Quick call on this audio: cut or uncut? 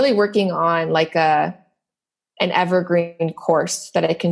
uncut